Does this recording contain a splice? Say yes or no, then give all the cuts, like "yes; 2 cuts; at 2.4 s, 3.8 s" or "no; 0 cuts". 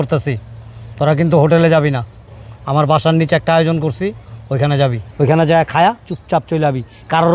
yes; 1 cut; at 5.0 s